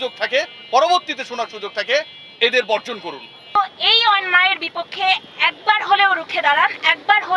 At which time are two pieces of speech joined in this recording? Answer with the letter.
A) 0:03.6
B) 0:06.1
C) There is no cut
A